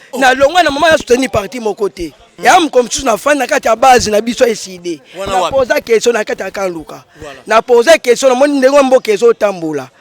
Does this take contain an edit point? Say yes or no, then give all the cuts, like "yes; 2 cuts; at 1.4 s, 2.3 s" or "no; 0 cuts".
yes; 1 cut; at 2.3 s